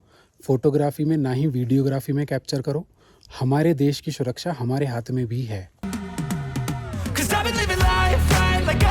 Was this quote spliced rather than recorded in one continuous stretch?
yes; 1 cut; at 5.7 s

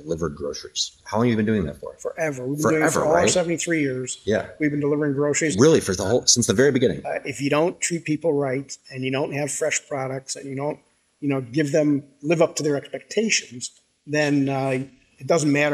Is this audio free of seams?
no; 2 cuts; at 1.0 s, 7.1 s

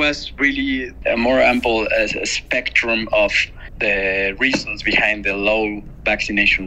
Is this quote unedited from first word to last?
no; 1 cut; at 1.0 s

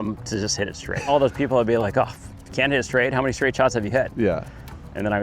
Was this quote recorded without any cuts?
no; 1 cut; at 1.1 s

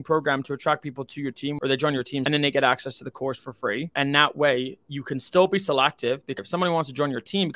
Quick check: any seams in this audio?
yes; 3 cuts; at 1.9 s, 3.9 s, 6.4 s

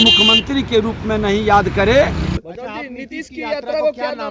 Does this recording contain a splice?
yes; 1 cut; at 2.4 s

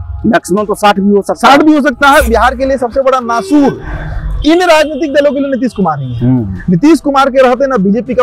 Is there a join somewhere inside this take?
yes; 1 cut; at 2.3 s

